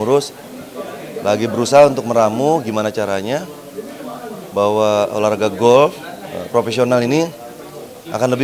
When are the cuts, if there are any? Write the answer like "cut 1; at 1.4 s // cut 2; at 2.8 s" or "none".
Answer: none